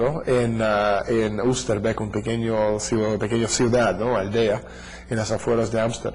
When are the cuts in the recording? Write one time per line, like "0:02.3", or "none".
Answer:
none